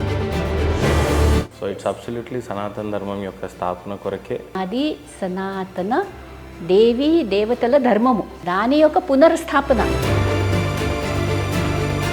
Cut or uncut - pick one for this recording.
uncut